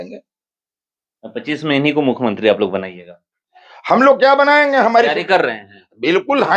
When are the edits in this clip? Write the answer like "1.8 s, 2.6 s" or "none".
none